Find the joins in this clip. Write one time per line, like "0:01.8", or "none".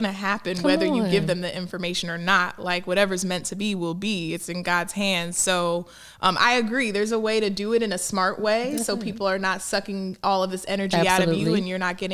none